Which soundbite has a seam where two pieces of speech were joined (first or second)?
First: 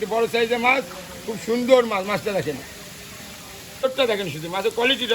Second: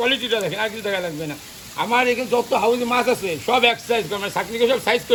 first